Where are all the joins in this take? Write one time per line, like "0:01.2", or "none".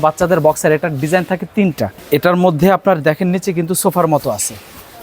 0:02.0